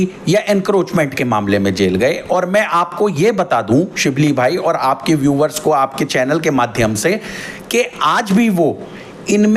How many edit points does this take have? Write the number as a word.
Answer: zero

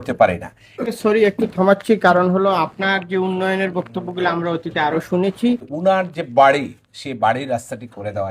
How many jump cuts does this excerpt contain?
two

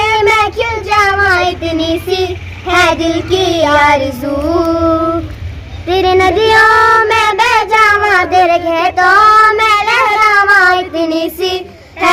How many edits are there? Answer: zero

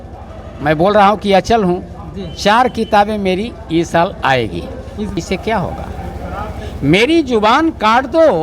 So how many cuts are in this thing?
one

